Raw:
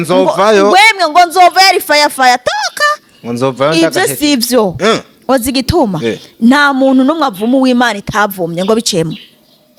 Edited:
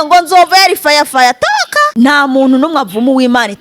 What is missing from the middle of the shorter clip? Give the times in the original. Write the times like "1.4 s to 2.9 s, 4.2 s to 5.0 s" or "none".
2.9 s to 6.3 s

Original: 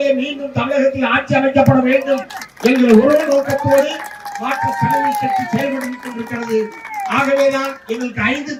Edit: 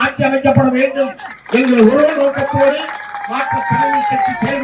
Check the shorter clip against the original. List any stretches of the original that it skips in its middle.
none

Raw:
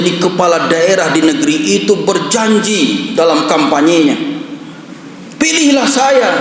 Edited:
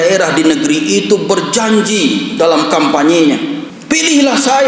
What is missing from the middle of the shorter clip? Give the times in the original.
4.5 s to 5.2 s

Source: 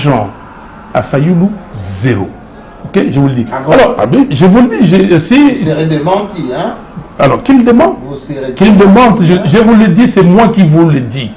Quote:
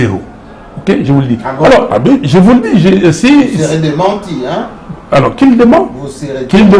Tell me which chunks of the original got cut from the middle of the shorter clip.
none

